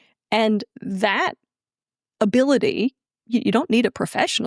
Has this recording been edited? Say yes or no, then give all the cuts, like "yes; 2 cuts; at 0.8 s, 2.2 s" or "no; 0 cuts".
yes; 1 cut; at 3.1 s